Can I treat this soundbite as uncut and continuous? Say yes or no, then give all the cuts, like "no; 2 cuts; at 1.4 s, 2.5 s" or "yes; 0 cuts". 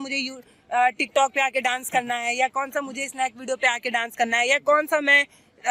yes; 0 cuts